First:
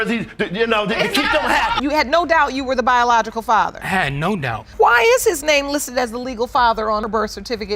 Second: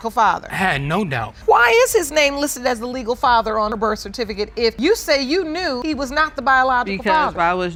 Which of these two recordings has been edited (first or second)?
first